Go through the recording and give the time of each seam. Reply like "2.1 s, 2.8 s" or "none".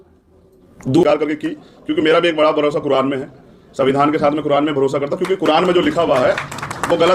1.0 s